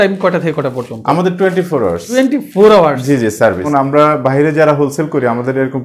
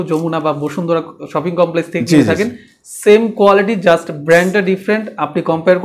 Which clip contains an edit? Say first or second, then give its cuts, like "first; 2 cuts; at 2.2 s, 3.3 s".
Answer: first; 2 cuts; at 2.1 s, 3.7 s